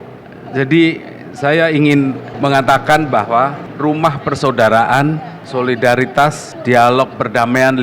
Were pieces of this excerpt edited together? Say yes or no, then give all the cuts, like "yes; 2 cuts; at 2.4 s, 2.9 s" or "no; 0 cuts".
yes; 4 cuts; at 2.3 s, 3.6 s, 5.3 s, 6.5 s